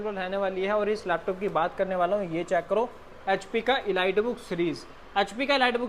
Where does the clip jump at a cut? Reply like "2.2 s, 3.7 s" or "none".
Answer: none